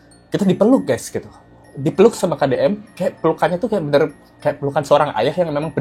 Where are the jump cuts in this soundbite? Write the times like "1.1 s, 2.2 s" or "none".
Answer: none